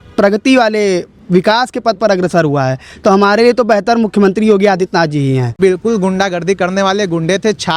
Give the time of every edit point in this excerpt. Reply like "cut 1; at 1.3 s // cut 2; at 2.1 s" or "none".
cut 1; at 5.6 s